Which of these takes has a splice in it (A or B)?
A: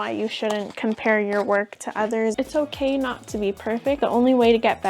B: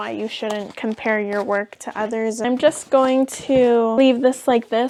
A